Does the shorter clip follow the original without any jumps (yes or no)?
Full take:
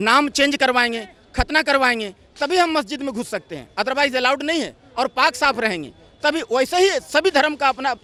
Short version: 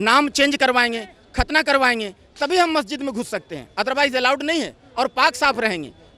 yes